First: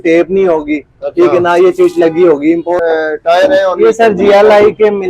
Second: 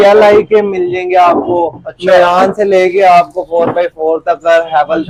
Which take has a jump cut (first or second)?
first